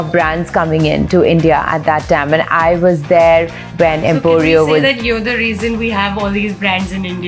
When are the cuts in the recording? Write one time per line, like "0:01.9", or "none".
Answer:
none